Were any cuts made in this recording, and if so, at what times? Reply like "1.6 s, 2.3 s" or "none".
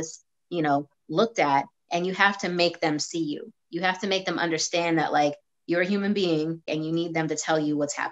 6.7 s